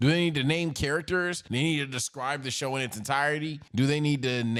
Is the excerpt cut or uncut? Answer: uncut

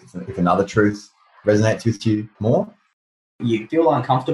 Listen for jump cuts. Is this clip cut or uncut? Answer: cut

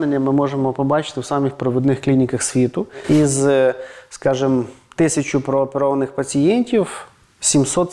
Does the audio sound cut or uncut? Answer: cut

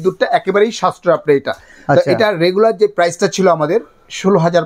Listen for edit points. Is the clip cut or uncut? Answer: uncut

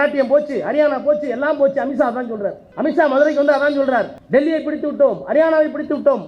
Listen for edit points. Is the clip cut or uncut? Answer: cut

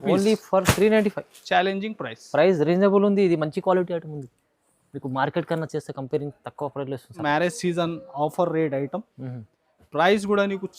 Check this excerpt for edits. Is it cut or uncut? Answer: cut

